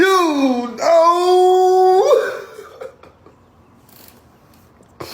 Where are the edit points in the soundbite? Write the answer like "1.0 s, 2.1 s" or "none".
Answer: 4.1 s